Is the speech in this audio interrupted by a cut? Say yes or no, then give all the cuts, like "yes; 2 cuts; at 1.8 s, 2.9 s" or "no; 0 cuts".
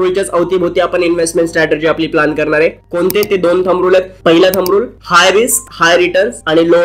no; 0 cuts